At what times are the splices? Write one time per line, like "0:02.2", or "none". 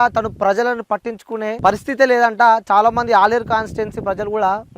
0:01.6